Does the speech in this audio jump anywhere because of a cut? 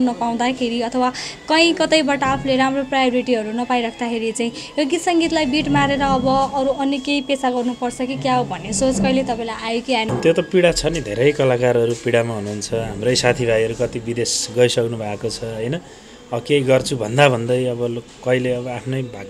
yes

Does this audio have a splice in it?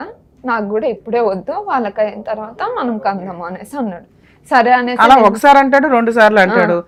no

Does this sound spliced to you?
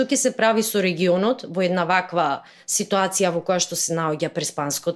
no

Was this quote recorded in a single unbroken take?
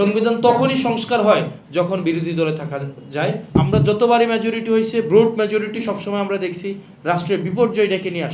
no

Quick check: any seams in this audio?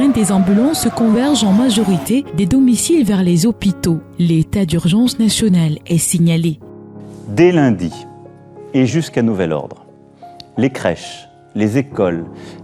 no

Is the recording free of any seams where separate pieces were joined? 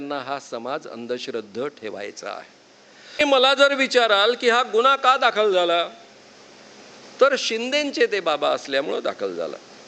no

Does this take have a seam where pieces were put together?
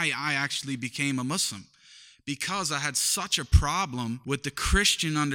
yes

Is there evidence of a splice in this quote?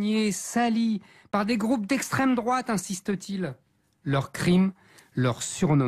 no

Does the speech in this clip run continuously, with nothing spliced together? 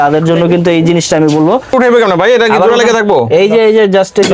no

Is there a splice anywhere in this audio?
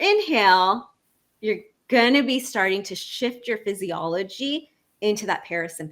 no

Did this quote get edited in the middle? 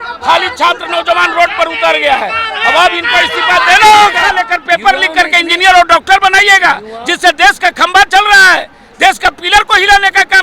yes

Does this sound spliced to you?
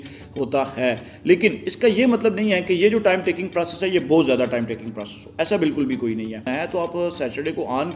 yes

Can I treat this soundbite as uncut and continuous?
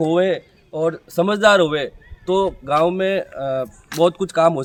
yes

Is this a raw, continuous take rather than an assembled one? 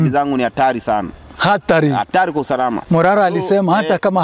yes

